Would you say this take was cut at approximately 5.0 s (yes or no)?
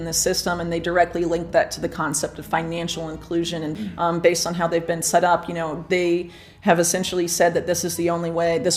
no